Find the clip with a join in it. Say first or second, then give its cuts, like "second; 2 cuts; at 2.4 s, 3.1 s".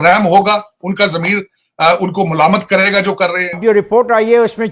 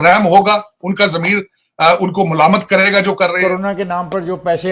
first; 1 cut; at 3.5 s